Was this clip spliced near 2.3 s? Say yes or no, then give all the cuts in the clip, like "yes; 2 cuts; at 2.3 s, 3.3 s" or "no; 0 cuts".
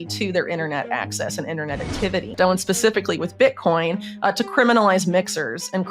yes; 1 cut; at 2.3 s